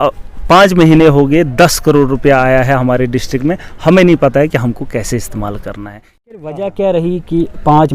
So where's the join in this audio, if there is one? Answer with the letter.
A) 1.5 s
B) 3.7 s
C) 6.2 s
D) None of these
C